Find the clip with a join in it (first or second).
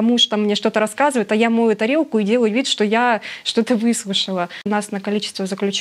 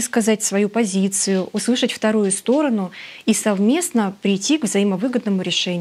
first